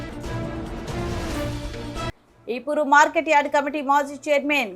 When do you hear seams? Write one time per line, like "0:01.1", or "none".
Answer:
0:02.2